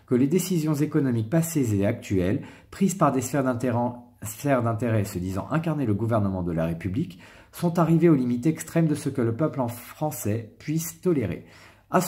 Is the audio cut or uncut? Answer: uncut